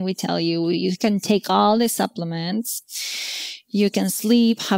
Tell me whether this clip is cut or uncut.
uncut